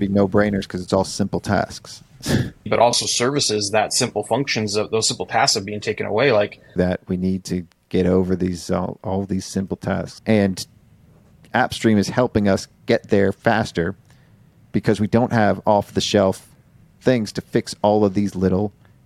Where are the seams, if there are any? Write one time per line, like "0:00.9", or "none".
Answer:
0:02.7
0:06.7
0:10.1
0:11.3